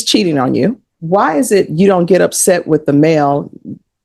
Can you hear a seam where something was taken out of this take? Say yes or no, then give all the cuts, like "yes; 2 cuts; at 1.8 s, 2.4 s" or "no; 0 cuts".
yes; 1 cut; at 0.9 s